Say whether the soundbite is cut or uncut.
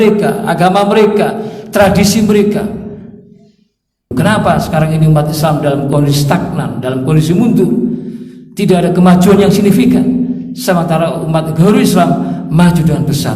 cut